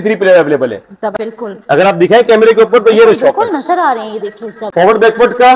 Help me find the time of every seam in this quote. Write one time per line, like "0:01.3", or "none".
0:01.1
0:04.6